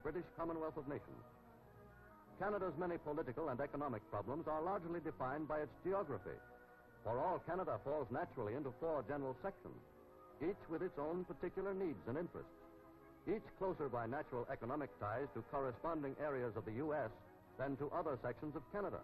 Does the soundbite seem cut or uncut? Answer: cut